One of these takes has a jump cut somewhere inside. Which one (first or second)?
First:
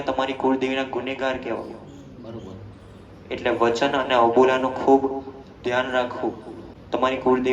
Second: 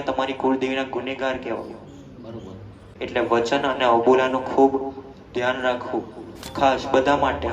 second